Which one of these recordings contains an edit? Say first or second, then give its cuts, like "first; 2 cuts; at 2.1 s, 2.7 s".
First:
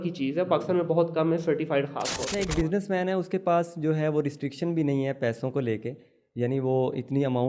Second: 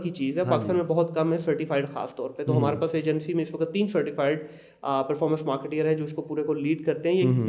first; 1 cut; at 2.2 s